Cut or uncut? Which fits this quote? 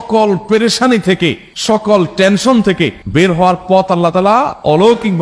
uncut